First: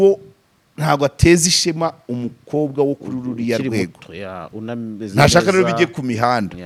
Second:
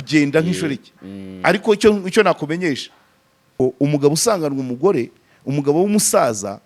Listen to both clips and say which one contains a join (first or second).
second